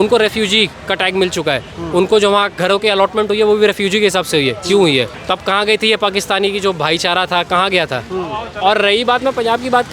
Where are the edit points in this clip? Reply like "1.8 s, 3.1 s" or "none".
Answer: none